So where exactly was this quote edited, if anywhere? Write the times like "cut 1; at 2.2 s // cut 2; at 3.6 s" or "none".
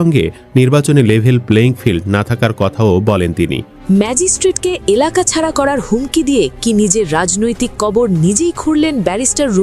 cut 1; at 3.8 s